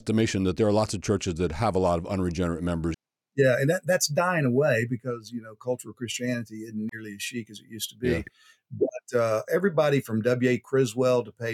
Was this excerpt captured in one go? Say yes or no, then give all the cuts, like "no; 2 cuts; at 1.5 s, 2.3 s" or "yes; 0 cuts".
no; 1 cut; at 2.9 s